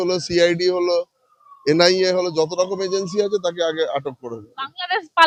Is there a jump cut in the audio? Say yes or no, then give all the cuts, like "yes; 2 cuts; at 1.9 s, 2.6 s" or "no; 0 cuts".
no; 0 cuts